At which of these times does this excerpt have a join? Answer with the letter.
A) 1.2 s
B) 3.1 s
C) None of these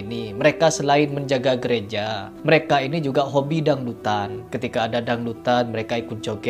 C